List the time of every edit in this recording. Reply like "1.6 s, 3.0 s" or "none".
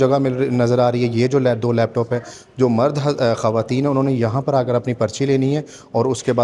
none

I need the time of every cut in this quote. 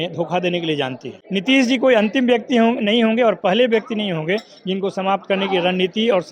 1.2 s

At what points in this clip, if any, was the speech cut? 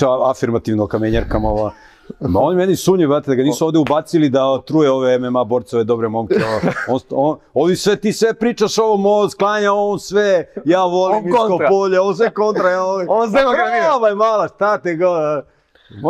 none

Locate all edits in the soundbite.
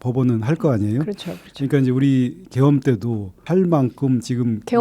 3.4 s

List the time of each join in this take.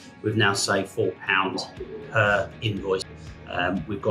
3.1 s

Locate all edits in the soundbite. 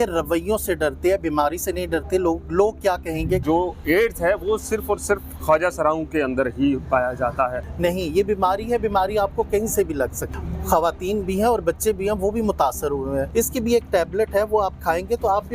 3.4 s, 7.6 s, 10.3 s, 13.3 s

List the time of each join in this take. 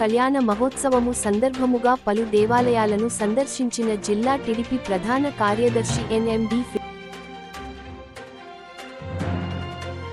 none

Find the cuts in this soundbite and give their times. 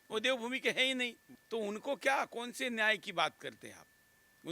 none

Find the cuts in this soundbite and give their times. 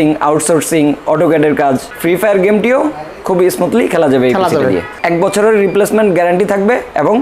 1.9 s, 4.9 s

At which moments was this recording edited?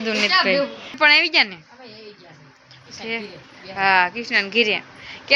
0.9 s

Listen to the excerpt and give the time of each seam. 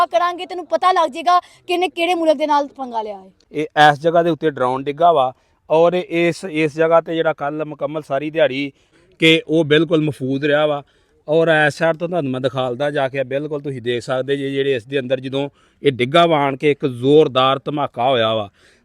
3.4 s, 8.9 s

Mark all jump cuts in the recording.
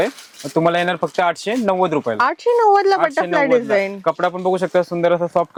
none

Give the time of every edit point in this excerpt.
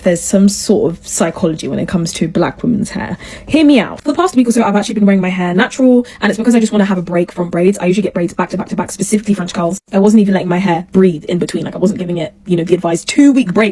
none

